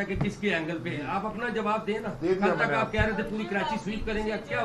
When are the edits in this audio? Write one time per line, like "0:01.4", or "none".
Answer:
none